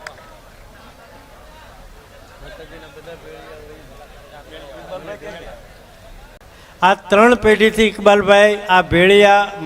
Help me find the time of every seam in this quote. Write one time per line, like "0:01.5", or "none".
0:06.4